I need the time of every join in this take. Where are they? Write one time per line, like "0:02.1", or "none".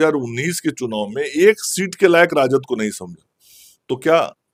none